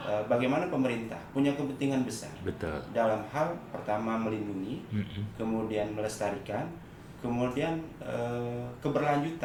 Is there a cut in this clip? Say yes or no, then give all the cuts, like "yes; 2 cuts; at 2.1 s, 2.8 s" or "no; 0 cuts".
no; 0 cuts